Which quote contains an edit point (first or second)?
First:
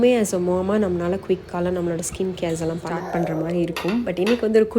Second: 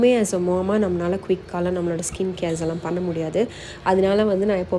first